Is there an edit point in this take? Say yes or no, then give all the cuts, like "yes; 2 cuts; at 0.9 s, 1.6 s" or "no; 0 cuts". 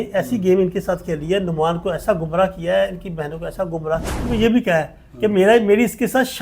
yes; 1 cut; at 4.3 s